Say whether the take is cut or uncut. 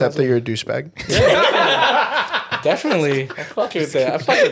uncut